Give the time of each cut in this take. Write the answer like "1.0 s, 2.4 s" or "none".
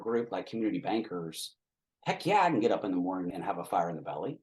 3.3 s